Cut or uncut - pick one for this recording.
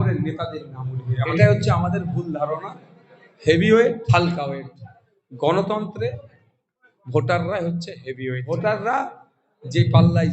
cut